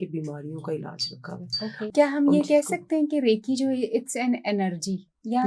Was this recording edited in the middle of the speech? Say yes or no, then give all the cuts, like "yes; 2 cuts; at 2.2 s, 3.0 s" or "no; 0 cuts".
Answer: yes; 1 cut; at 1.9 s